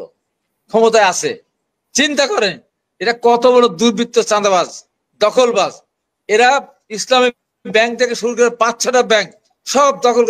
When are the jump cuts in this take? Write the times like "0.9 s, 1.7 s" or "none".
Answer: none